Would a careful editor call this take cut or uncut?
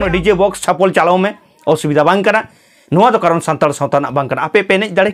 uncut